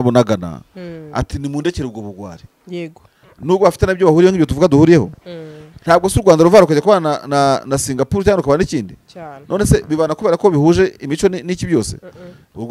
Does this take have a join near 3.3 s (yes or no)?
yes